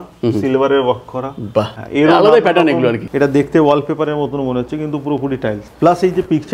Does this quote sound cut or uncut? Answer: cut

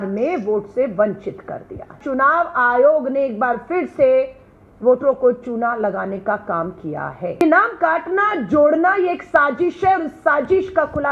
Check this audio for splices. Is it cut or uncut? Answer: cut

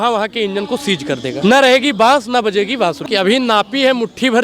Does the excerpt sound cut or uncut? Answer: cut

